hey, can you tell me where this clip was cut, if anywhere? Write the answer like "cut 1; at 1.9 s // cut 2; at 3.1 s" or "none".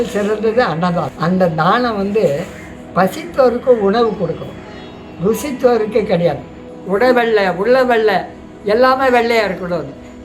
cut 1; at 1.1 s // cut 2; at 6.7 s

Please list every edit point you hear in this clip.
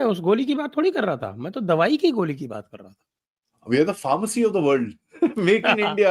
none

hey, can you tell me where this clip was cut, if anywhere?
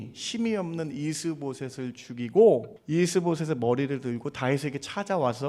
cut 1; at 2.8 s

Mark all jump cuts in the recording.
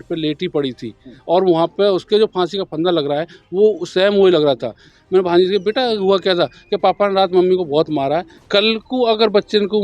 cut 1; at 4.9 s // cut 2; at 8.3 s

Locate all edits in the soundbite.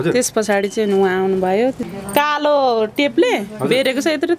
cut 1; at 1.8 s

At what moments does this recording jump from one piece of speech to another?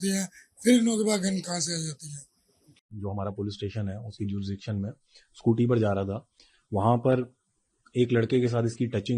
cut 1; at 2.9 s

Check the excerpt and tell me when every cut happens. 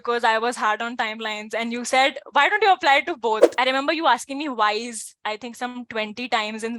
cut 1; at 3.5 s

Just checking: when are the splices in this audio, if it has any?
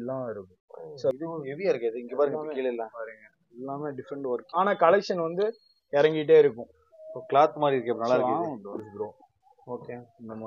cut 1; at 1.1 s // cut 2; at 4.5 s // cut 3; at 8.9 s

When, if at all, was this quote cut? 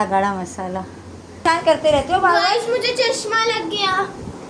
cut 1; at 1.4 s

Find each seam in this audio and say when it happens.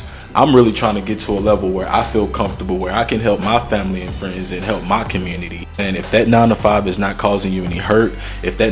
cut 1; at 5.8 s

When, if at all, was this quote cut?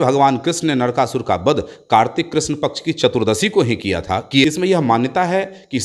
cut 1; at 4.4 s

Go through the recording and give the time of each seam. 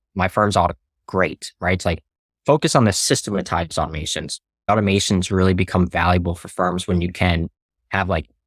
cut 1; at 3.0 s // cut 2; at 4.7 s

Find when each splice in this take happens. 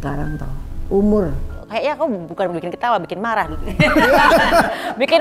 cut 1; at 1.6 s

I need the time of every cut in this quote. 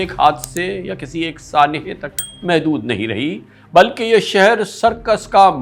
none

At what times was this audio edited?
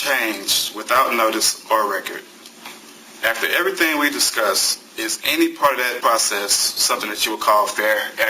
cut 1; at 5.9 s

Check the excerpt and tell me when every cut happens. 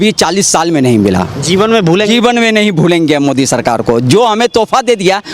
none

